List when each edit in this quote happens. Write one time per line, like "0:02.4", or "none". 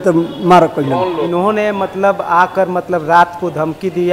0:01.2